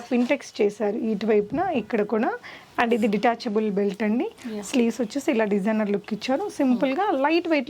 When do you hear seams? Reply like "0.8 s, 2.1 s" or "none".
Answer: none

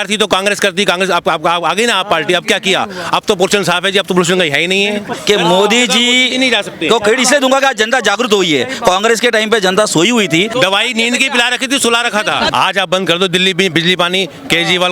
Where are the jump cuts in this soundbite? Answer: 5.1 s, 10.5 s, 12.5 s

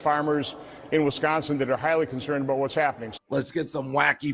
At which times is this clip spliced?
3.1 s

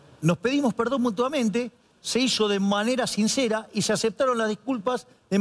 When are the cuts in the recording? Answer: none

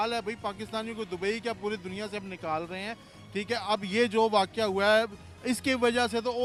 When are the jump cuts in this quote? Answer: none

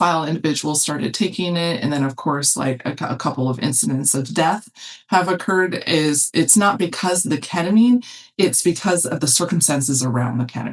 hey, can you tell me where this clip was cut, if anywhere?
none

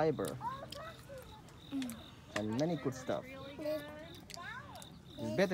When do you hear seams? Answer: none

